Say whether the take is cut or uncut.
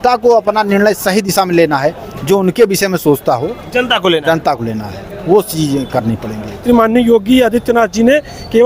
cut